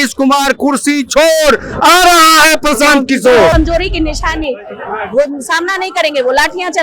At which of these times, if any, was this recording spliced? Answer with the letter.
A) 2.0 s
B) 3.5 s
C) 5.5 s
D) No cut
B